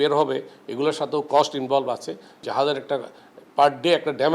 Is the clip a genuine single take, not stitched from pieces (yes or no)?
no